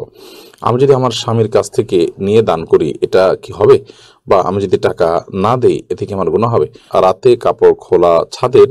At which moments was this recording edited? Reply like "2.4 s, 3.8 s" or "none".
6.8 s